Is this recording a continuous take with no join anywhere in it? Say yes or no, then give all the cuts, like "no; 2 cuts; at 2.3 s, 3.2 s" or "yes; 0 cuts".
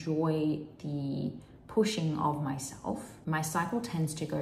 no; 1 cut; at 3.1 s